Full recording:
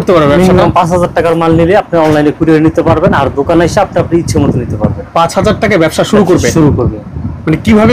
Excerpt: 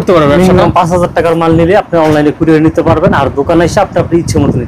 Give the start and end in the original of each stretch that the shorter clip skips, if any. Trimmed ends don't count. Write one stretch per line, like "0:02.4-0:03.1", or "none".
none